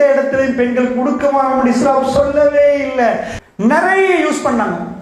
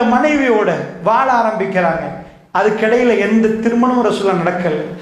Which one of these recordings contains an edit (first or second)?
first